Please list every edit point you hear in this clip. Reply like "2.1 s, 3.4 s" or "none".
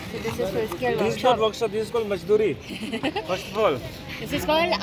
none